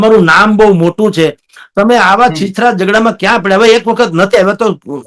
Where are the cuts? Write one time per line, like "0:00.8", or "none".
none